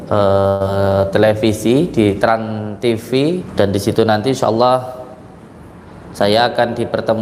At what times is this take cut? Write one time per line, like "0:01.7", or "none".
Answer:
0:03.5